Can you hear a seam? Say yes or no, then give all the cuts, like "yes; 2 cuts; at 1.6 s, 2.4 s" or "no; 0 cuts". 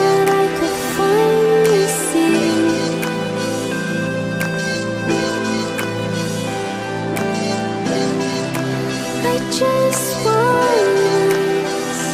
yes; 1 cut; at 11.1 s